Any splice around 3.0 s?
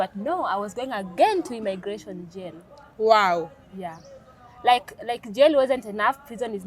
no; 0 cuts

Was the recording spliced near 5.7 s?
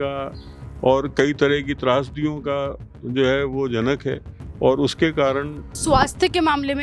yes; 1 cut; at 5.7 s

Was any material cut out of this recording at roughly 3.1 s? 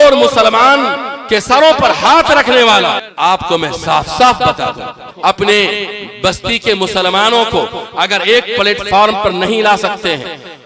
yes; 2 cuts; at 3.1 s, 5.0 s

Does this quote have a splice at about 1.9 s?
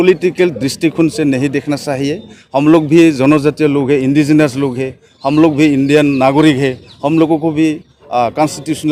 no; 0 cuts

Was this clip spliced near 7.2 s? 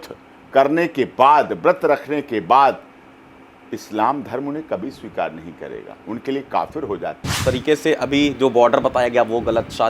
yes; 1 cut; at 7.2 s

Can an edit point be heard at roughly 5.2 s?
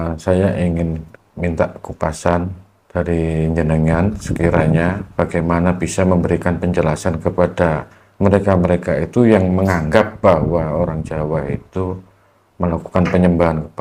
no; 0 cuts

